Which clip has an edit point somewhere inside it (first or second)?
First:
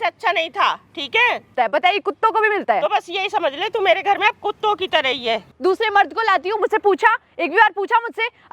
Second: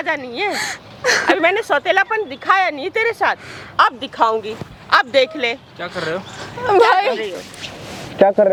first